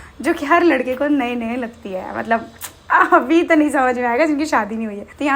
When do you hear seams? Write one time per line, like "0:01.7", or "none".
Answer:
none